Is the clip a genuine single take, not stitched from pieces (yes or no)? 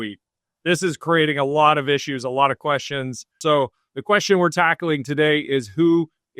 no